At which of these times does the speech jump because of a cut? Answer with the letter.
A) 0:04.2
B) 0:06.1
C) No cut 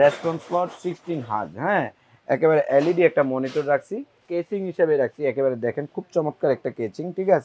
A